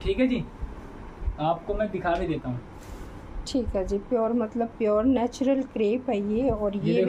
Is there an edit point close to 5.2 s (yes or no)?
no